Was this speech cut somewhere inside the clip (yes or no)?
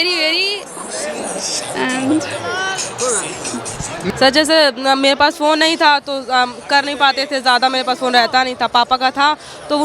yes